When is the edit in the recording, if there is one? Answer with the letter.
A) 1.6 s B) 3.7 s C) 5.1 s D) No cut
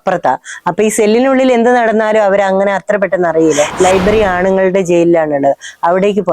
B